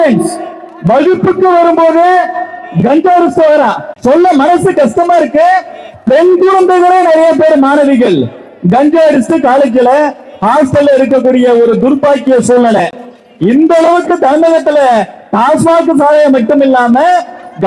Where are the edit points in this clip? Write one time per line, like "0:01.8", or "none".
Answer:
none